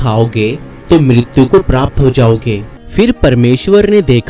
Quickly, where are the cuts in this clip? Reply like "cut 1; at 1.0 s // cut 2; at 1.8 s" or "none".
cut 1; at 2.7 s